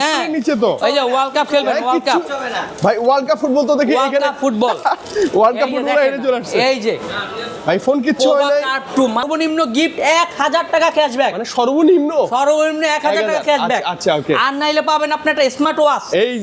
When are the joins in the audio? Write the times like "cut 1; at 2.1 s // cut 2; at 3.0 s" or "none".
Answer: cut 1; at 9.2 s